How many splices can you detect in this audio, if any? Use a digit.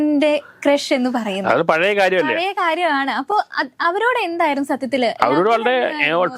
0